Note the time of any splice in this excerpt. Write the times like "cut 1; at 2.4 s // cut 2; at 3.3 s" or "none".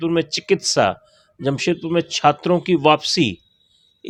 none